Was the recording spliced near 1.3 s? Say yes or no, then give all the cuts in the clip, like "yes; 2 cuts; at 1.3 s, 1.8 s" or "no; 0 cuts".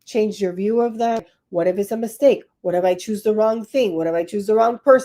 yes; 1 cut; at 1.3 s